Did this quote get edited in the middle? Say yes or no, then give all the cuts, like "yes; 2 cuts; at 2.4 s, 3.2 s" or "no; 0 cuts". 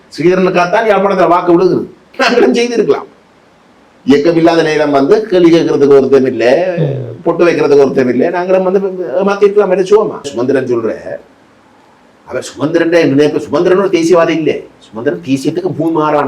yes; 2 cuts; at 2.0 s, 10.3 s